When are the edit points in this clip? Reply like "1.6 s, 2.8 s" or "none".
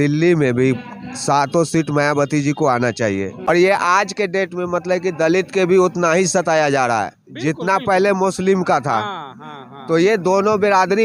3.5 s